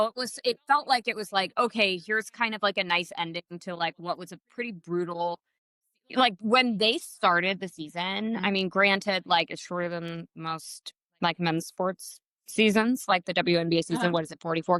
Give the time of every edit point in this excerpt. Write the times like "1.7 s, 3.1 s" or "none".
none